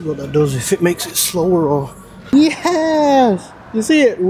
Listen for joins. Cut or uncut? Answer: cut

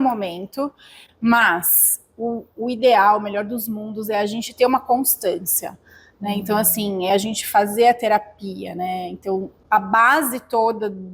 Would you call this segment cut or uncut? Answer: uncut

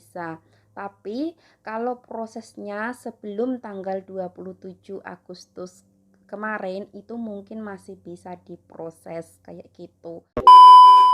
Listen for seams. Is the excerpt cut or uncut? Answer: cut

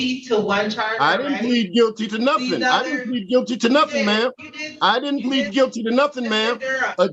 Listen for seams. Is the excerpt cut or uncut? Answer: uncut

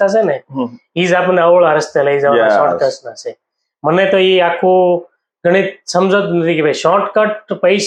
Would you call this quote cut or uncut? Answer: uncut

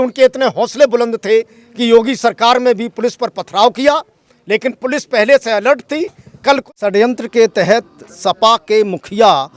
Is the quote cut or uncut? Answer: cut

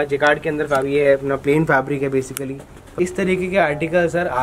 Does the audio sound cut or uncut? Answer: cut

